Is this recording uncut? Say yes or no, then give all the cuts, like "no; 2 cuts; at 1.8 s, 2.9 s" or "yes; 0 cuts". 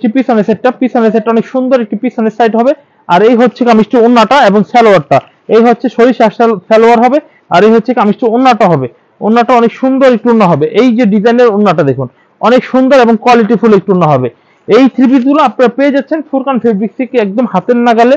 yes; 0 cuts